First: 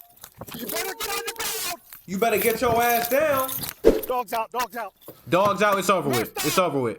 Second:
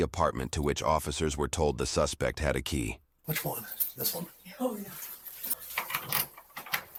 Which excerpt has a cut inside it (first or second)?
first